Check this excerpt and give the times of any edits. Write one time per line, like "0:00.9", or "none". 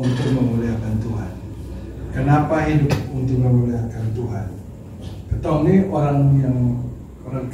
none